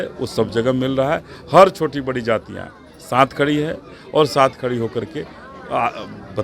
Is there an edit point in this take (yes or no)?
no